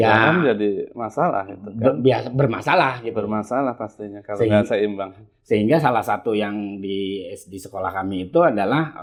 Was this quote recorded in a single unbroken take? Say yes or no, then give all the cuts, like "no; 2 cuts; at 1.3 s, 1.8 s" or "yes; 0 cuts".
yes; 0 cuts